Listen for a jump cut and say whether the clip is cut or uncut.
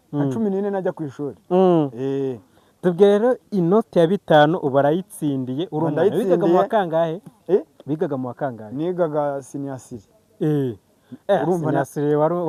uncut